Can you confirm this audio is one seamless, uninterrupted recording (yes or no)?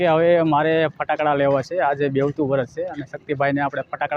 yes